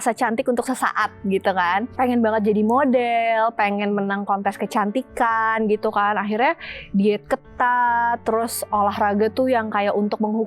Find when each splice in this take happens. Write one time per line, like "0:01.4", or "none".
0:01.9